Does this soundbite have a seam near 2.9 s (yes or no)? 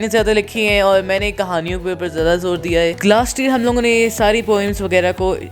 yes